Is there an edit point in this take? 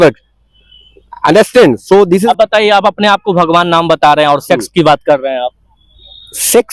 yes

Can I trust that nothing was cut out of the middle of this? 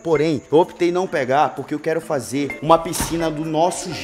yes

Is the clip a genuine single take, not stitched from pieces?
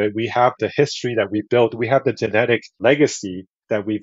no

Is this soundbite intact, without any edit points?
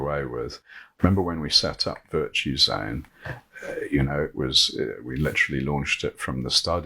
no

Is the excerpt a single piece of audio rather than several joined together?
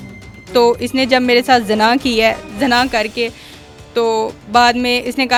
yes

